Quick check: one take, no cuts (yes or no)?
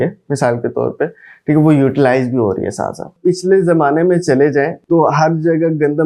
no